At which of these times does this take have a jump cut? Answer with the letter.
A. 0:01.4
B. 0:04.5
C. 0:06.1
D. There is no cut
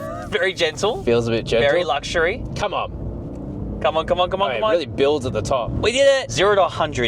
C